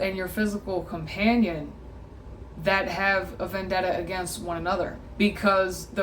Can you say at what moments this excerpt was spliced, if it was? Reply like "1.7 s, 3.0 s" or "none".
5.0 s